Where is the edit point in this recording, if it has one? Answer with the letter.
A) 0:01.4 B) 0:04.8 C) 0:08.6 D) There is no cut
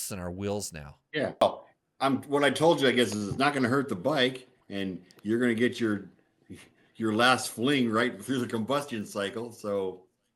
A